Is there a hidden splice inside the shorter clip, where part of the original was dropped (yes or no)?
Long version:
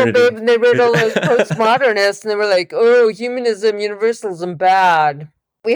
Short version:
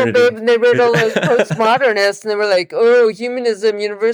no